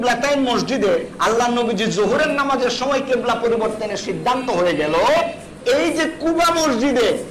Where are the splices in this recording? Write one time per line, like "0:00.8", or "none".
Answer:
none

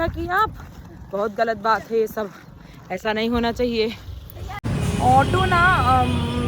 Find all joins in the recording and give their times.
0:04.6

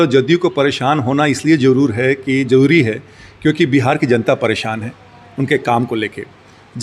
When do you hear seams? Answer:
none

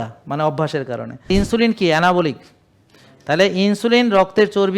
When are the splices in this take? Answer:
0:01.1

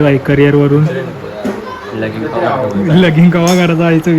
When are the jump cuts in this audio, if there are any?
none

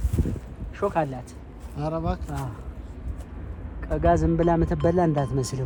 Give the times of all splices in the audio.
none

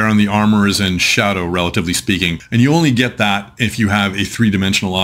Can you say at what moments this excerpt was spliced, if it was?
0:02.4

